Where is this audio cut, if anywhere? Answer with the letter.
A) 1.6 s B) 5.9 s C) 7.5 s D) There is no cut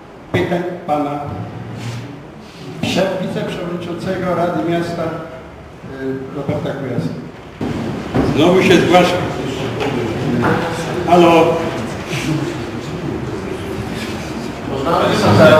C